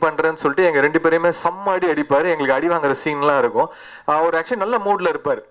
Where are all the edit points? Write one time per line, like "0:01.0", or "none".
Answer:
none